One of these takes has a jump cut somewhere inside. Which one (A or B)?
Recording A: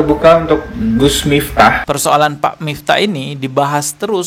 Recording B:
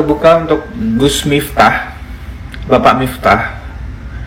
A